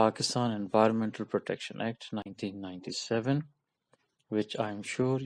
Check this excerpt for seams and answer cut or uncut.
uncut